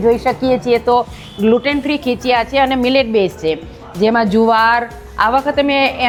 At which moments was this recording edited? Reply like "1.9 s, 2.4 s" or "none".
none